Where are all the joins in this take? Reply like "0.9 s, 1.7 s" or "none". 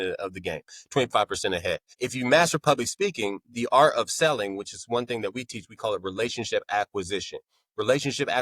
1.9 s